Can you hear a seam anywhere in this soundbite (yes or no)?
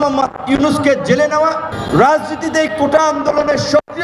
yes